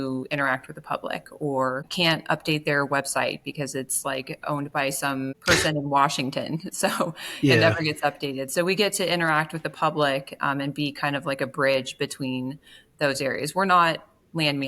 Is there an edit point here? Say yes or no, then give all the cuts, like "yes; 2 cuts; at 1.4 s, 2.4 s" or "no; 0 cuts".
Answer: yes; 2 cuts; at 1.9 s, 5.3 s